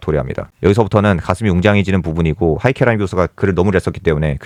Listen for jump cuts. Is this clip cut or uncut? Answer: uncut